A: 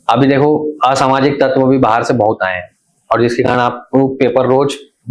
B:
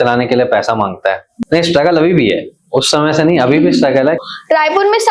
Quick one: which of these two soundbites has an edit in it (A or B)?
B